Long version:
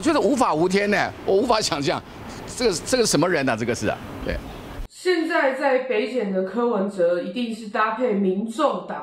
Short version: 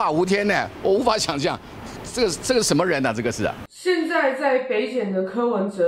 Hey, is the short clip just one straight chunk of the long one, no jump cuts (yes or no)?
no